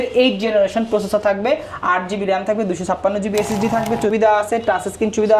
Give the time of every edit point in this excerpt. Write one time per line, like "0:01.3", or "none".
0:04.1